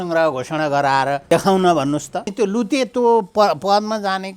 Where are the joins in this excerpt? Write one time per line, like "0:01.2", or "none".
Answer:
0:01.2
0:02.3